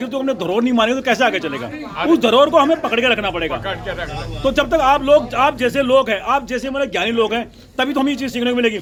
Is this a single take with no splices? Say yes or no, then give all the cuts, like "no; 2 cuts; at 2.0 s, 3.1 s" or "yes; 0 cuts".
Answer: yes; 0 cuts